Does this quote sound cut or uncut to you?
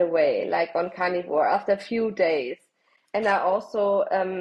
uncut